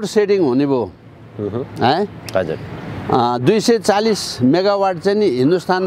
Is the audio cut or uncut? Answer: uncut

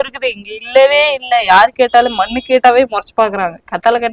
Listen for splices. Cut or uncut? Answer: uncut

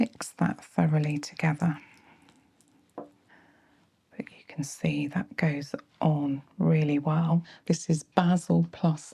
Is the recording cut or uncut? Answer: cut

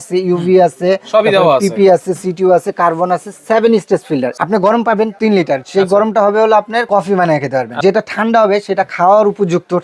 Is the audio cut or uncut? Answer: cut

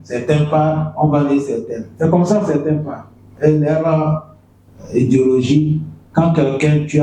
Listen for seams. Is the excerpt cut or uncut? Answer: cut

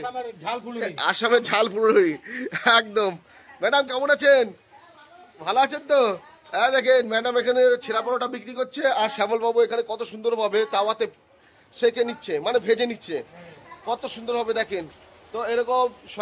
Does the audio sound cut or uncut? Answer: uncut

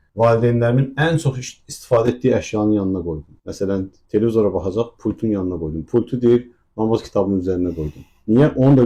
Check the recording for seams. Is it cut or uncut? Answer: uncut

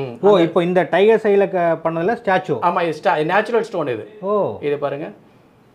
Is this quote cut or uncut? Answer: uncut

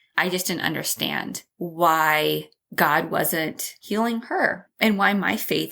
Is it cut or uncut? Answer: cut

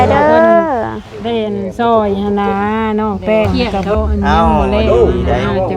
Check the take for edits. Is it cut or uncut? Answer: cut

